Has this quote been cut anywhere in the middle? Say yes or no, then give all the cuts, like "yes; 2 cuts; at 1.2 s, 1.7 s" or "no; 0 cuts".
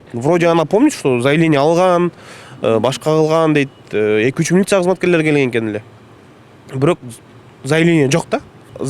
no; 0 cuts